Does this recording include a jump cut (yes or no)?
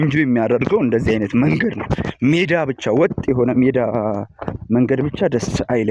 no